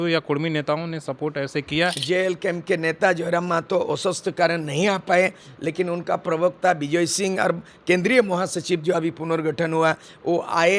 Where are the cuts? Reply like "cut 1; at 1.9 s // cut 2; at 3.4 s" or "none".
cut 1; at 2.0 s